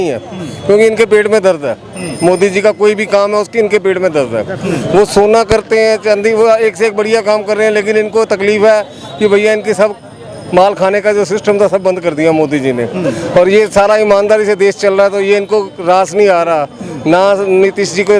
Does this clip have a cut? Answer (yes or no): no